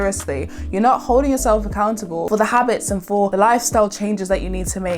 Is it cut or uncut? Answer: cut